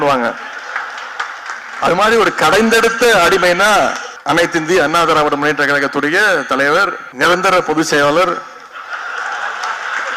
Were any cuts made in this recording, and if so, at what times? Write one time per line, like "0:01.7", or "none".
0:04.1
0:07.0